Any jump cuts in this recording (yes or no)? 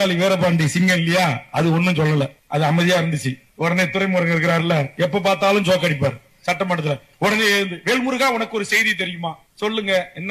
no